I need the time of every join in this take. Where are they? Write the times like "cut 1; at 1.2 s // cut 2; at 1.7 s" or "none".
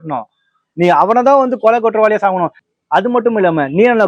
cut 1; at 2.6 s